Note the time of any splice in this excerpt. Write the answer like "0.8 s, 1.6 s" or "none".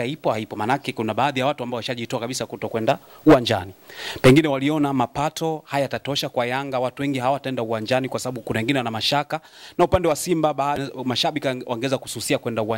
11.3 s